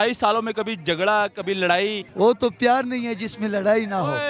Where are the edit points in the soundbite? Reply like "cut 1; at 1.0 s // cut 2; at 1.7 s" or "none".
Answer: cut 1; at 2.0 s